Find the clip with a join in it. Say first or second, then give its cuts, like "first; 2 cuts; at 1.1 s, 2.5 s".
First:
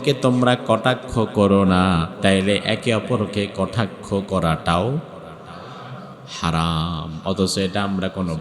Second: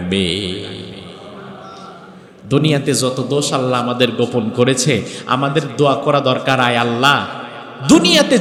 first; 1 cut; at 2.1 s